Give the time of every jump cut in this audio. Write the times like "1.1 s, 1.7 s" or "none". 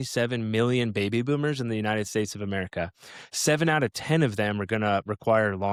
none